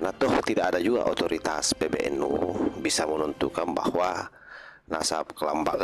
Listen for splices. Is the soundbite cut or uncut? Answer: uncut